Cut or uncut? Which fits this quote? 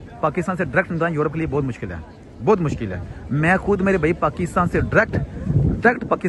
uncut